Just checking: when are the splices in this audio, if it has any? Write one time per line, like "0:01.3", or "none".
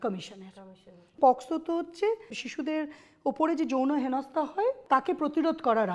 0:01.2
0:02.4
0:04.8